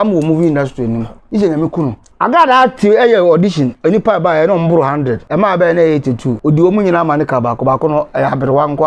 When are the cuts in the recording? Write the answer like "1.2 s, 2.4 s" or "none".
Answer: 1.2 s, 2.0 s, 5.2 s, 6.3 s

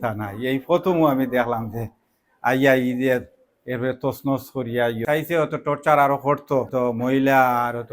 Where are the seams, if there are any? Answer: 5.0 s, 6.7 s

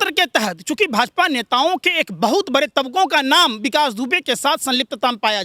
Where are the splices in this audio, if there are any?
none

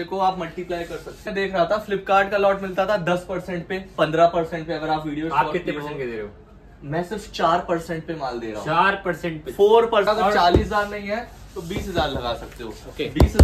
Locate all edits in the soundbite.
1.2 s, 10.1 s

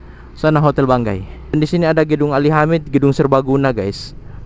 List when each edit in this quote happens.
1.6 s

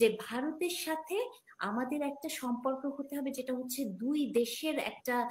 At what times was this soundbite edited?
none

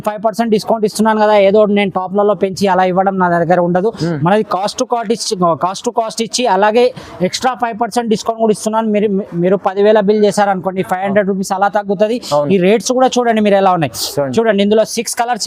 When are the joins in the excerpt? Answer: none

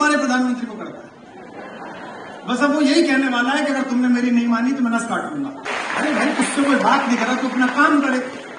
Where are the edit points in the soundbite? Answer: 5.6 s

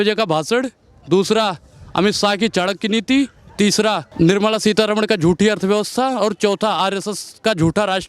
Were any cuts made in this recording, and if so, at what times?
4.1 s

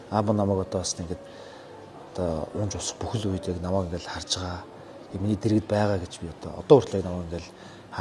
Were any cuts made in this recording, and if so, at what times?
none

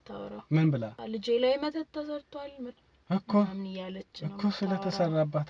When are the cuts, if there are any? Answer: 1.0 s

